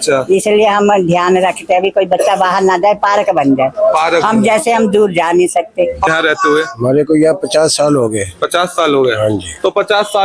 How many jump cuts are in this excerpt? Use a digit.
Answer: 1